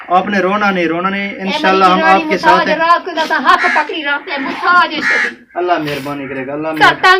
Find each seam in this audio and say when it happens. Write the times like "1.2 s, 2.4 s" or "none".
none